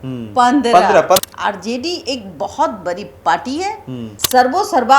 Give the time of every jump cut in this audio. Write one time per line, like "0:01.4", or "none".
0:01.2